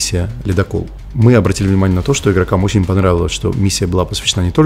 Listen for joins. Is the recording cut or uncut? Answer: cut